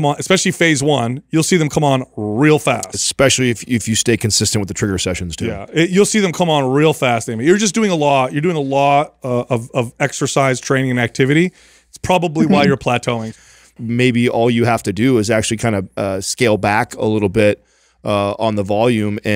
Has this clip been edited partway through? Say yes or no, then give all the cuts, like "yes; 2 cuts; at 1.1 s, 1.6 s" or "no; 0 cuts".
yes; 1 cut; at 13.6 s